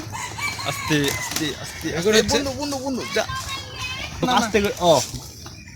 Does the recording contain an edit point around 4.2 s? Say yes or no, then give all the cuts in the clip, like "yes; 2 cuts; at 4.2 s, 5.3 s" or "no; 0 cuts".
yes; 1 cut; at 4.2 s